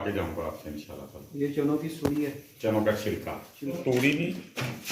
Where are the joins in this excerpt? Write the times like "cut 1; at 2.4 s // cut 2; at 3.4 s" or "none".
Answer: cut 1; at 3.8 s